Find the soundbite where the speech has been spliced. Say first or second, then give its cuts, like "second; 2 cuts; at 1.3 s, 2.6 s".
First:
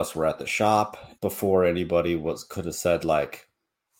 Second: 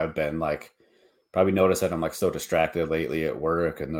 first; 1 cut; at 1.0 s